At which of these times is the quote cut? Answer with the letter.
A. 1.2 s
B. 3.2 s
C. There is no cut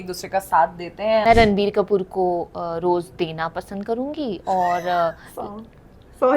A